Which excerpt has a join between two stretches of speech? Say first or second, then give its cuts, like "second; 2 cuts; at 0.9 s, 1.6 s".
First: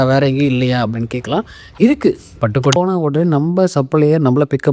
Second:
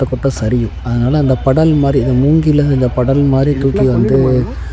first; 1 cut; at 2.8 s